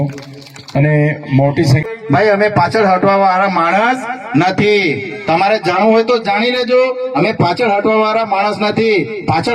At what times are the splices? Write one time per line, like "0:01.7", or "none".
0:01.9